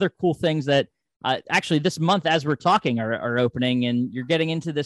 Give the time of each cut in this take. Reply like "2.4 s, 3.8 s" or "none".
none

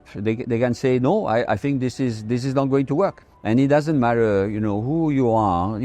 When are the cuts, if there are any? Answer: 3.2 s

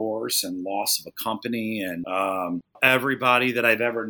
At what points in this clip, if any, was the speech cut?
2.0 s, 2.8 s

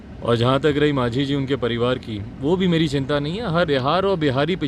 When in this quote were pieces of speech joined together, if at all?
3.7 s

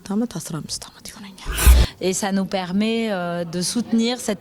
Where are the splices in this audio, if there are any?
1.6 s

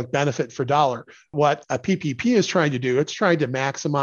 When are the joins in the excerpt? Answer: 1.3 s

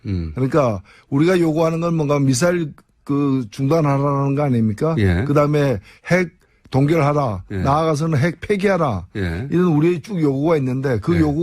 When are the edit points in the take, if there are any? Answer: 9.0 s

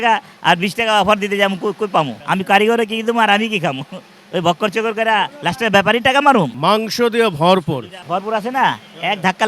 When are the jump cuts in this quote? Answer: 2.2 s, 6.5 s, 7.9 s

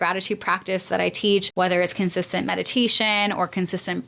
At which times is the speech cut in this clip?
1.5 s

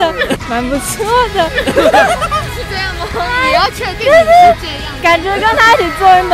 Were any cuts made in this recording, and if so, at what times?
none

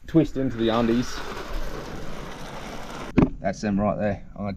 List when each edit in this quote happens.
3.1 s

